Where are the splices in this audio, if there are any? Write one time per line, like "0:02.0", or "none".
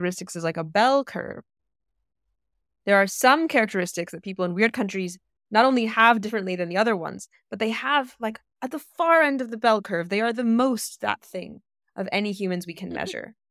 none